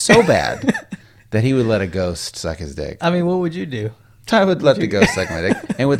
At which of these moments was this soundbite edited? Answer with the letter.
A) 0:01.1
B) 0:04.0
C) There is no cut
C